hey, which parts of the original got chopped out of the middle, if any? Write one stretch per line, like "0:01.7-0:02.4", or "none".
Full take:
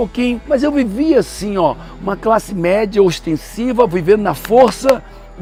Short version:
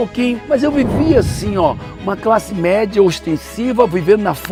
none